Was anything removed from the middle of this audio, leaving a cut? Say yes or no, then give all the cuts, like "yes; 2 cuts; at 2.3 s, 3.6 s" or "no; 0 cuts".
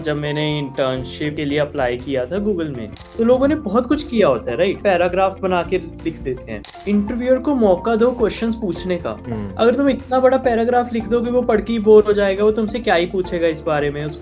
yes; 4 cuts; at 1.4 s, 3.1 s, 4.8 s, 6.7 s